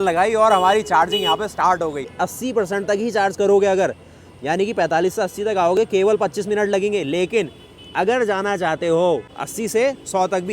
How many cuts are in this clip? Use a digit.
2